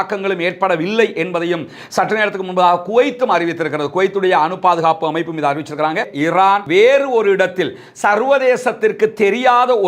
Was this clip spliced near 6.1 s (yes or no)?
yes